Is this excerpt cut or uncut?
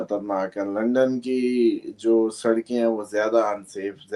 uncut